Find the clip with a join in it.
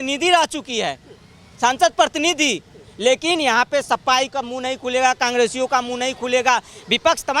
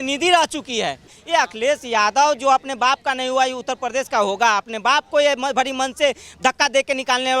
second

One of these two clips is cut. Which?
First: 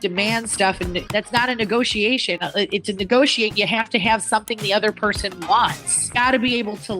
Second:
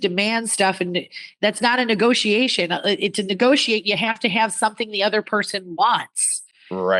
first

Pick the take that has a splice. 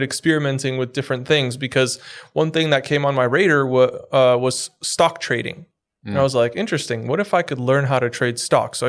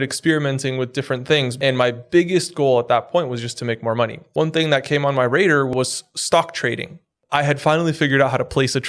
second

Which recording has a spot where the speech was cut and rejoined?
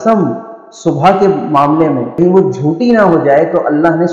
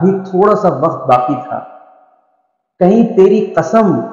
first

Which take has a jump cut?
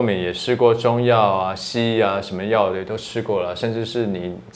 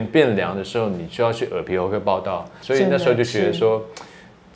second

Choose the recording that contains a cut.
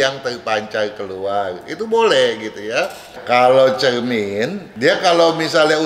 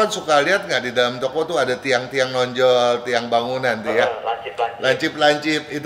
first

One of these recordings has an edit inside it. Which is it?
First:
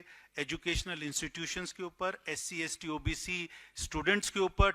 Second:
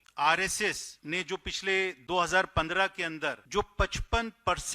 second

